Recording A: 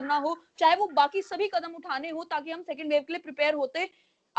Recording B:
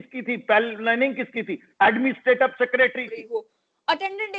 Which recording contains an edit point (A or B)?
B